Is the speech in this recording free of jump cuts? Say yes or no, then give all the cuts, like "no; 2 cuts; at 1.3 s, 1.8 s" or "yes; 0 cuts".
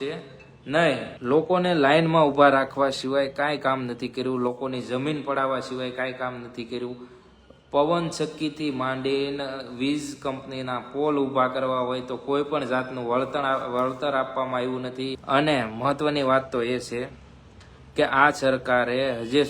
no; 2 cuts; at 1.1 s, 15.2 s